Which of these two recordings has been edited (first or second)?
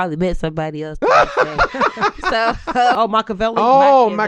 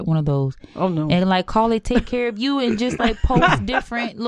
first